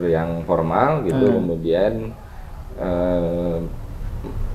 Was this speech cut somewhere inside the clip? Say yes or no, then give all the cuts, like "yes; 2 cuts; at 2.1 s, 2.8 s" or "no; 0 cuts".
no; 0 cuts